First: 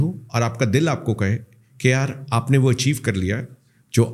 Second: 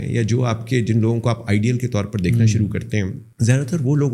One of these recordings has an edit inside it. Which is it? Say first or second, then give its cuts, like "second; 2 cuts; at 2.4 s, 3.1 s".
second; 1 cut; at 3.2 s